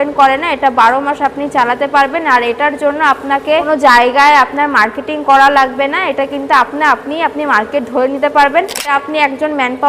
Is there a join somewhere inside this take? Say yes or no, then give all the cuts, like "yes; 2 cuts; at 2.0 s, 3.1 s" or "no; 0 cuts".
yes; 2 cuts; at 3.7 s, 8.9 s